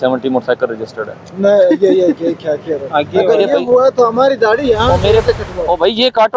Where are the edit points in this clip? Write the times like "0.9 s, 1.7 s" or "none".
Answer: none